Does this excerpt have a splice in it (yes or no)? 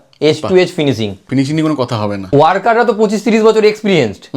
yes